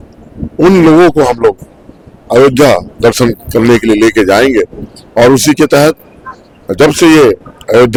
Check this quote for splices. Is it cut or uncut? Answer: uncut